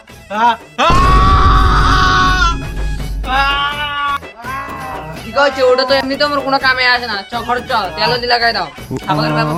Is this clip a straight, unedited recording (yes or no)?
yes